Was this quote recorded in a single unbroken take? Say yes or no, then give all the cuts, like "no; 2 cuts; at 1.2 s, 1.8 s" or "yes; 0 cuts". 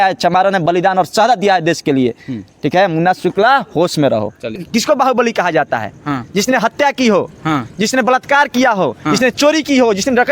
no; 1 cut; at 4.6 s